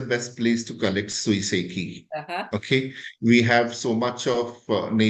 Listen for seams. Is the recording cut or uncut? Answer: uncut